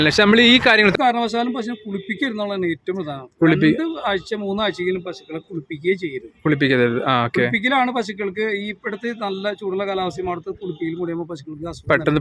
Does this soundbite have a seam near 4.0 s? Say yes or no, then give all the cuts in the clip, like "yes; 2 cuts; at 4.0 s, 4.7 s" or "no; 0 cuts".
no; 1 cut; at 0.9 s